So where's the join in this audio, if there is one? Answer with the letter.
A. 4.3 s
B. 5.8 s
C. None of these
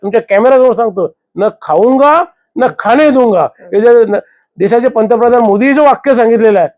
C